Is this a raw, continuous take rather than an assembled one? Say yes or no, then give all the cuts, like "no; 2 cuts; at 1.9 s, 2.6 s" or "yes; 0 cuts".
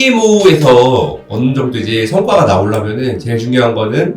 yes; 0 cuts